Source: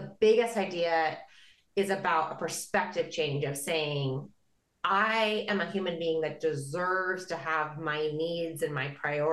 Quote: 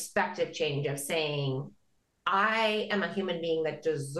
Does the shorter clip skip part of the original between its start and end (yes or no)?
no